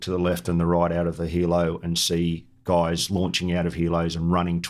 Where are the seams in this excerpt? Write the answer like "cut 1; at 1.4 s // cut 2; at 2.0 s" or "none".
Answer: none

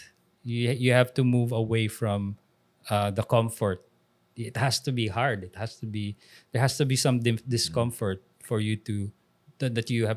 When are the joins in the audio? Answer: none

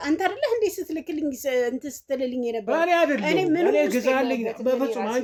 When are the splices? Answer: none

